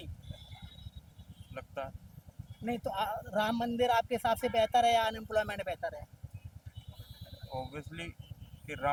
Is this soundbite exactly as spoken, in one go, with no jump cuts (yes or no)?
yes